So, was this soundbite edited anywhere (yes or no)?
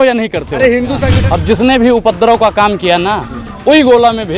yes